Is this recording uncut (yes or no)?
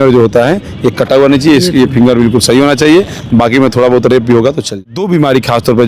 no